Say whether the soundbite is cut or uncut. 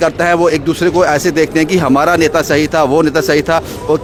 uncut